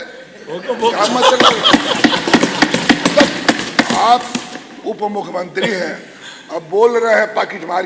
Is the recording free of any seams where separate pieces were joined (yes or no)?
yes